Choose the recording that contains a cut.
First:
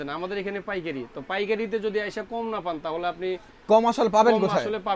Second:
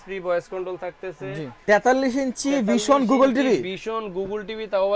second; 1 cut; at 1.5 s

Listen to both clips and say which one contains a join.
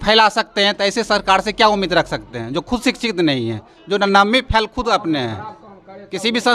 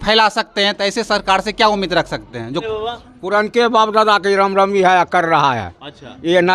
second; 1 cut; at 2.7 s

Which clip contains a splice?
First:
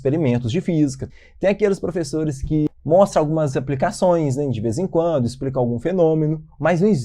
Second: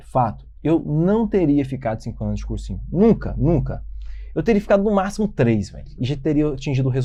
first; 2 cuts; at 1.1 s, 2.7 s

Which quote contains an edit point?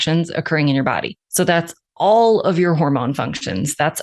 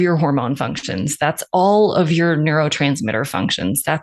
first; 1 cut; at 1.2 s

